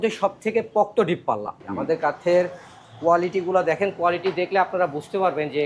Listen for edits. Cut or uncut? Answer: cut